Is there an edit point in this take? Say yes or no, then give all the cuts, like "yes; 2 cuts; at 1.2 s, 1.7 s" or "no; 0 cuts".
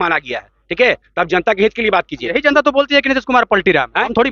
yes; 1 cut; at 2.2 s